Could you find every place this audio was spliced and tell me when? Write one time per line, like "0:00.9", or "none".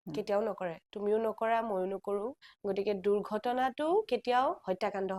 0:02.5